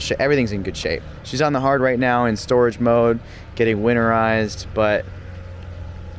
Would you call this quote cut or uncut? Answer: uncut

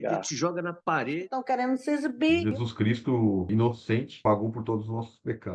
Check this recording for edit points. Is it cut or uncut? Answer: uncut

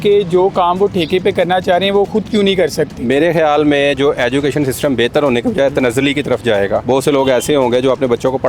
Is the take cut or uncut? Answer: cut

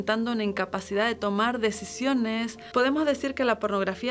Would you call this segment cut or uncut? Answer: cut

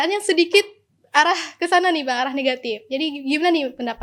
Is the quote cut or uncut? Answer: uncut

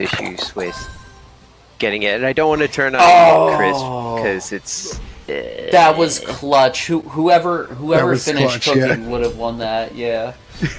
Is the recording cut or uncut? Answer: uncut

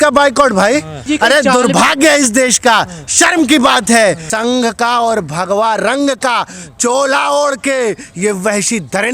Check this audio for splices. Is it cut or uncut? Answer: cut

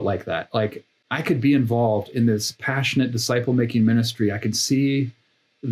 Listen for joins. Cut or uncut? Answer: cut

